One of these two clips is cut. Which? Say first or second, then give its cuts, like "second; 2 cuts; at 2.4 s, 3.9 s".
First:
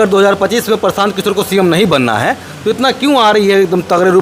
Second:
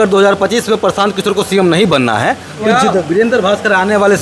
second; 1 cut; at 2.7 s